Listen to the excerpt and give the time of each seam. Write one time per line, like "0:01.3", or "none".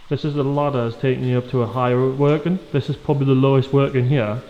none